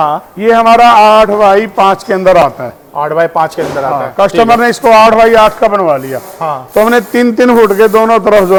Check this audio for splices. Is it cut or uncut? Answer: uncut